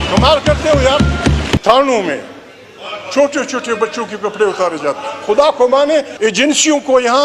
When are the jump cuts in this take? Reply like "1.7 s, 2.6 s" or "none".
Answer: 1.6 s, 6.1 s